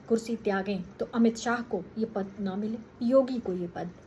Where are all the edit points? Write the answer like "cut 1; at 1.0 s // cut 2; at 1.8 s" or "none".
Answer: cut 1; at 0.9 s // cut 2; at 1.9 s // cut 3; at 2.9 s